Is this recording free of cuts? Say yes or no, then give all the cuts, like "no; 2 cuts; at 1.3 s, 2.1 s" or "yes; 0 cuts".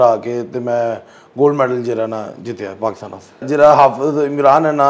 no; 1 cut; at 3.4 s